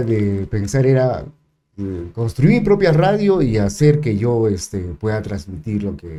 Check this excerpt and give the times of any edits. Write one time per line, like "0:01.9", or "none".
none